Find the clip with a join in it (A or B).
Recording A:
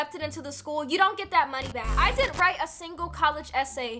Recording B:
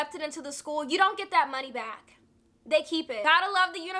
A